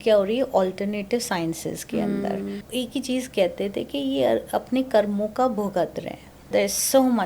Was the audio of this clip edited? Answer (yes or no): yes